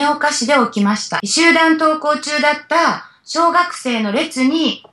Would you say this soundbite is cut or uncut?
cut